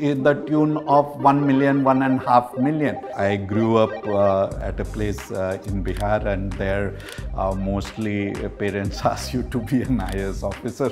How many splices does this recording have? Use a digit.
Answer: 2